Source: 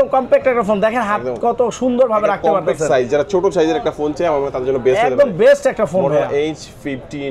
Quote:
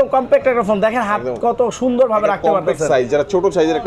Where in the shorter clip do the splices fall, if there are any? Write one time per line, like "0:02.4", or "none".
none